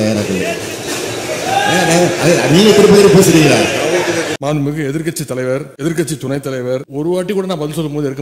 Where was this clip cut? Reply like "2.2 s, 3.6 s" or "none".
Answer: 4.3 s, 5.7 s, 6.9 s